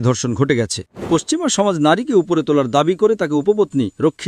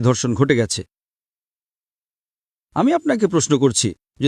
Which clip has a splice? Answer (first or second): first